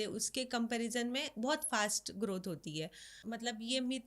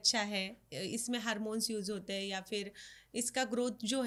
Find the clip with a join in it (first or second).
first